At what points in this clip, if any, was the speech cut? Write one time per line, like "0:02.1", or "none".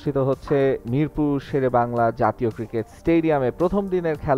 none